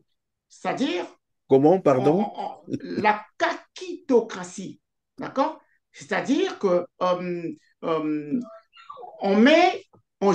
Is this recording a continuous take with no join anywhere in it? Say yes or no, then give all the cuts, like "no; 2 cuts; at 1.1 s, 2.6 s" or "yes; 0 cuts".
yes; 0 cuts